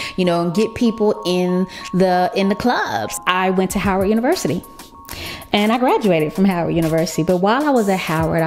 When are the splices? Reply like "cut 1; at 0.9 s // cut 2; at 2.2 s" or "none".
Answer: cut 1; at 3.1 s